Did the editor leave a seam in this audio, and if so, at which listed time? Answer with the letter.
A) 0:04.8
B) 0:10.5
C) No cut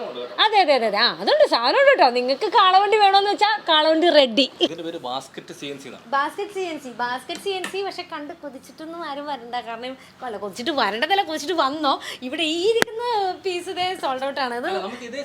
A